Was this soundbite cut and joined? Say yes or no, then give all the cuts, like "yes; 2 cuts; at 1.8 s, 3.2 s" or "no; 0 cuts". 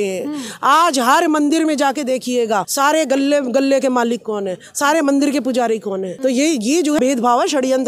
yes; 3 cuts; at 2.7 s, 6.1 s, 7.0 s